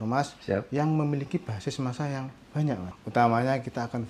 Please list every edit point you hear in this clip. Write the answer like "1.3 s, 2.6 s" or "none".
2.8 s